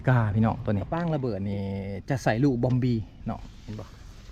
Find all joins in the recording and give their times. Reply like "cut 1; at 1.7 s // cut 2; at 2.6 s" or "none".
cut 1; at 0.9 s